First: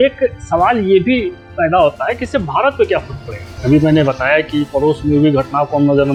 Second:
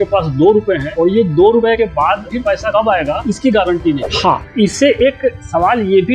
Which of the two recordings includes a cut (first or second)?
second